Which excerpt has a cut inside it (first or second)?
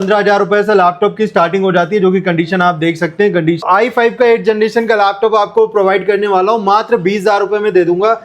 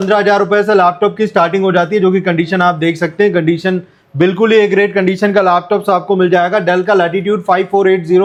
first